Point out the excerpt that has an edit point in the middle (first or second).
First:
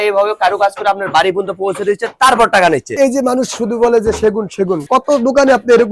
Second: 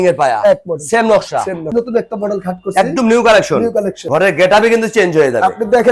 second